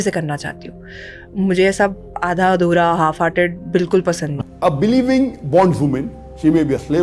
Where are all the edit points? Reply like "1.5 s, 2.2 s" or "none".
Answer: 4.4 s